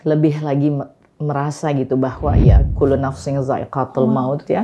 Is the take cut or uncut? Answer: uncut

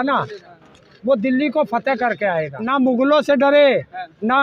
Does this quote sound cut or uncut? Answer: cut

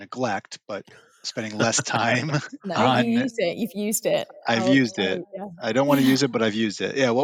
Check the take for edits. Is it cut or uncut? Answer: uncut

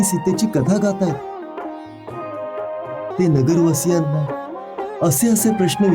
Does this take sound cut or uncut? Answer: cut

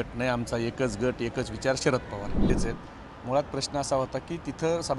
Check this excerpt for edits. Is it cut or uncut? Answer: cut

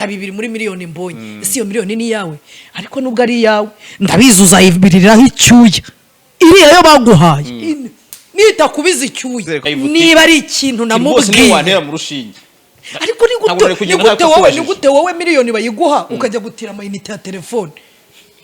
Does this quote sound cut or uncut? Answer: cut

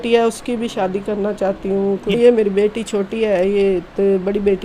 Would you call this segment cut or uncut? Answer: cut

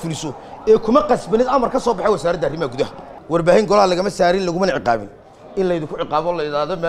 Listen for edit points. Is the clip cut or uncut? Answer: cut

